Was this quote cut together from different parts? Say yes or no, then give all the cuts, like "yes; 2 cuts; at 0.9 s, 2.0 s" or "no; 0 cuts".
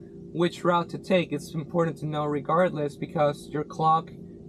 no; 0 cuts